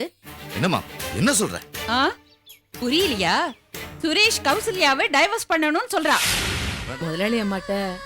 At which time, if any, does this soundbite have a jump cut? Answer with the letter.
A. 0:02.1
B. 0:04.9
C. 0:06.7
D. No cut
C